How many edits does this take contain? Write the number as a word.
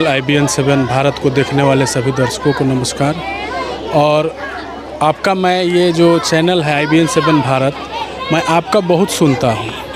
zero